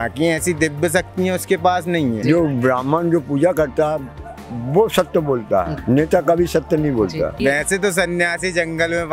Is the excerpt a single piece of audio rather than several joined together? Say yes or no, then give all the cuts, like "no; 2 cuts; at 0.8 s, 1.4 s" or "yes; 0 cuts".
no; 2 cuts; at 2.2 s, 7.4 s